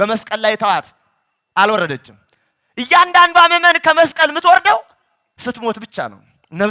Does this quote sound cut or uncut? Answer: uncut